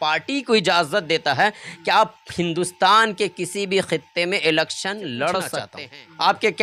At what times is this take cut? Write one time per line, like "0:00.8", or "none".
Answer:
none